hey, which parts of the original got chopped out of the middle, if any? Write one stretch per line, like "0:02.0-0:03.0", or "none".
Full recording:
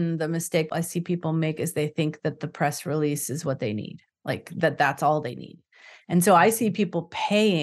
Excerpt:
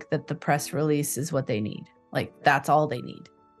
0:04.5-0:04.7